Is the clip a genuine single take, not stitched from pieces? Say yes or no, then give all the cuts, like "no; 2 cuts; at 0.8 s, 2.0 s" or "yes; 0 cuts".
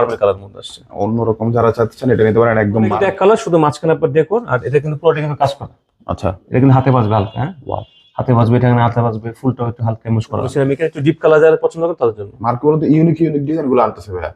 no; 2 cuts; at 3.0 s, 10.5 s